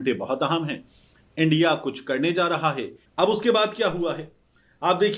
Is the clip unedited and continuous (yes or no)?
no